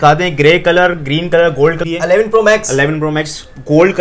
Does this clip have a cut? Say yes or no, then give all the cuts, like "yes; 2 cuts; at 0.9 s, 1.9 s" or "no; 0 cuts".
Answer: yes; 1 cut; at 1.8 s